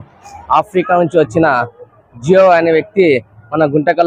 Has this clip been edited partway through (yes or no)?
no